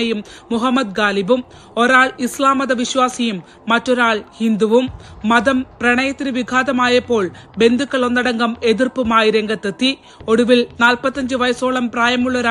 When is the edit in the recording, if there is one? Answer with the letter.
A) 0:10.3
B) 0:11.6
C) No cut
B